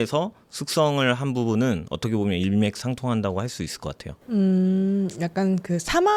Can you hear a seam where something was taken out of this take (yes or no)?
no